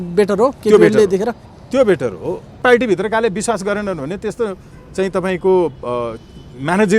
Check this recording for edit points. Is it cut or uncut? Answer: cut